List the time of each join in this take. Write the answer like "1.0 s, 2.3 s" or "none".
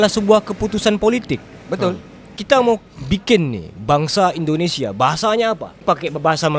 none